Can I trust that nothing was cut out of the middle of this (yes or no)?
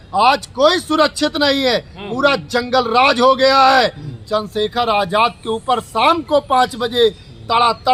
yes